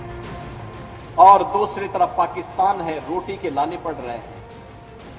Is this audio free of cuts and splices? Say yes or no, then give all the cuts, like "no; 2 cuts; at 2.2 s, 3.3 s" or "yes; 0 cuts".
no; 1 cut; at 4.3 s